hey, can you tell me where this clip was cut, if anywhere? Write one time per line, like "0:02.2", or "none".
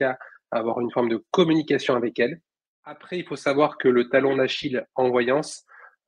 0:03.0